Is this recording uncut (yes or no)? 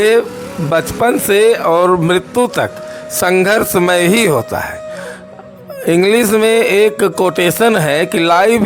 yes